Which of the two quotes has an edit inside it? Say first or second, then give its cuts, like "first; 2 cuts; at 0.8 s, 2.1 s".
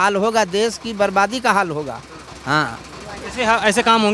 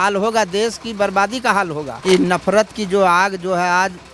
second; 1 cut; at 1.9 s